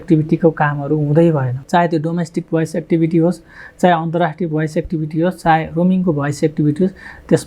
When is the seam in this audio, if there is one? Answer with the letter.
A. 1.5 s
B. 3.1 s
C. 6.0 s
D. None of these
A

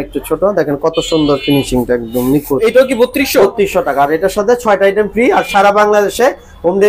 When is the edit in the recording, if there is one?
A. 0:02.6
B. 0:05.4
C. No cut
A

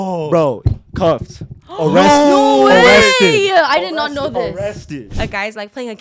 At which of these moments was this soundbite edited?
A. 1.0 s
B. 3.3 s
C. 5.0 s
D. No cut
C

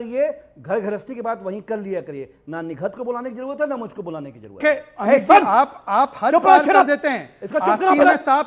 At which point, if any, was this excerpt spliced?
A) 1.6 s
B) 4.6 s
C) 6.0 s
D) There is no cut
B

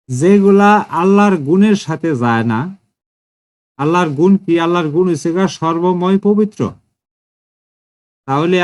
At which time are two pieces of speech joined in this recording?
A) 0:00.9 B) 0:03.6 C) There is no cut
A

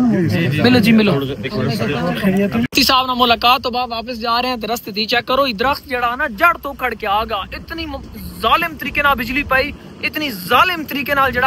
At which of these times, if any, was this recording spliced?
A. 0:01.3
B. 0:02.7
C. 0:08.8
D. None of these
B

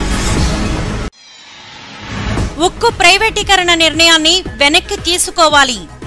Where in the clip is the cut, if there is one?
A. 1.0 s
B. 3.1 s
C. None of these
A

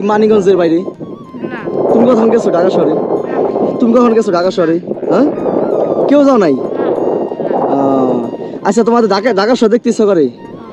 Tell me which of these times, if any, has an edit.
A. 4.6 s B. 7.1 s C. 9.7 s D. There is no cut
D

